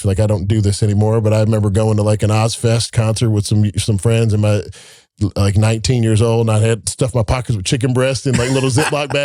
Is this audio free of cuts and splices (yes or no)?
yes